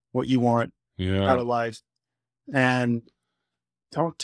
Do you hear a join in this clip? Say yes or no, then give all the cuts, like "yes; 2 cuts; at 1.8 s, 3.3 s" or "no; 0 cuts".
no; 0 cuts